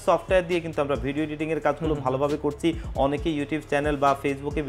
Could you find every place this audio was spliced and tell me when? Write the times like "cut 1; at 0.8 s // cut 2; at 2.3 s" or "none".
none